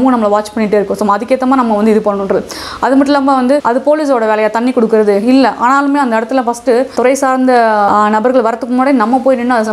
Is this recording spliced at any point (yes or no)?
yes